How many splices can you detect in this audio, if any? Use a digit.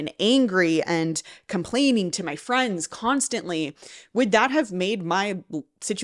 0